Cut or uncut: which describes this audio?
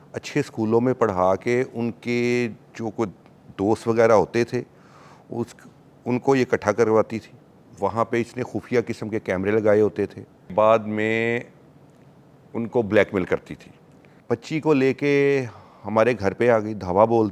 cut